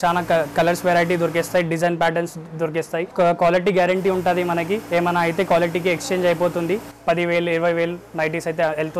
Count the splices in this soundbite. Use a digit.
2